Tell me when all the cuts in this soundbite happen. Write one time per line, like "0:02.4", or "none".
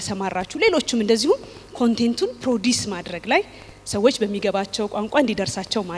none